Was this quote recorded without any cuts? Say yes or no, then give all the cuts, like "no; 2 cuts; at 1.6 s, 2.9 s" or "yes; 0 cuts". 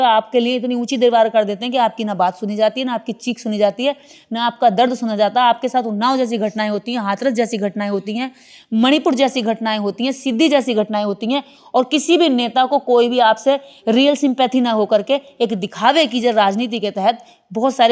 yes; 0 cuts